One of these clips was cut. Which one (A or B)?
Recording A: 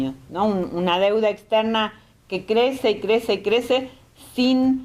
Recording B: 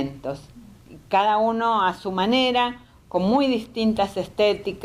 B